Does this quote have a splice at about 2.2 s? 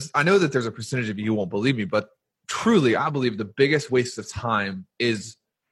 yes; 1 cut; at 2.2 s

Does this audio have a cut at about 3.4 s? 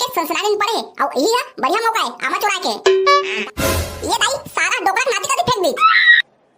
yes; 1 cut; at 3.4 s

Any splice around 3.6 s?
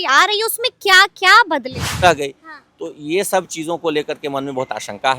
no; 1 cut; at 2.0 s

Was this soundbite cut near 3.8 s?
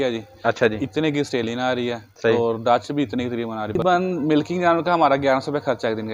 yes; 1 cut; at 3.8 s

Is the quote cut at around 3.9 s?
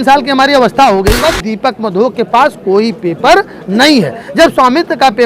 no; 1 cut; at 1.2 s

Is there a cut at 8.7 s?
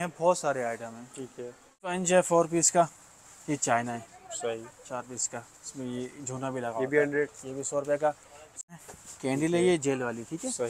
yes; 2 cuts; at 1.9 s, 8.7 s

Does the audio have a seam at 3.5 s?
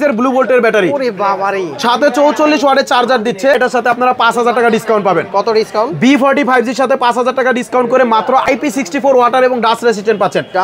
yes; 2 cuts; at 3.5 s, 8.4 s

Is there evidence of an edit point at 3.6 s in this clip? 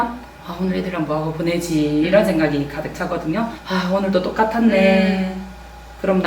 yes; 1 cut; at 3.6 s

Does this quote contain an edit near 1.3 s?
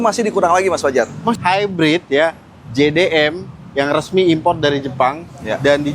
yes; 1 cut; at 1.3 s

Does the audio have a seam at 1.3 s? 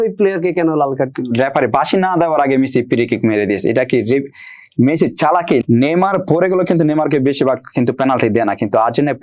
yes; 2 cuts; at 1.3 s, 5.6 s

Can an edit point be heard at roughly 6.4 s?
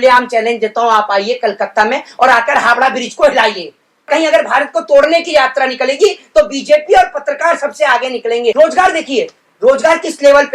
no; 2 cuts; at 4.1 s, 8.5 s

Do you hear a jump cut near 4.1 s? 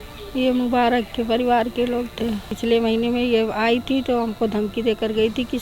no; 1 cut; at 2.5 s

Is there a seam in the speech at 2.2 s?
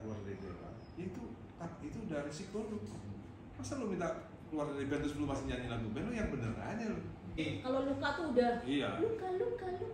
no; 1 cut; at 7.4 s

